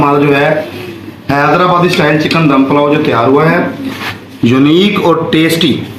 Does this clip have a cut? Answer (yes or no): no